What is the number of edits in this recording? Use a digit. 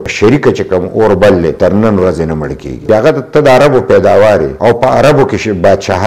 2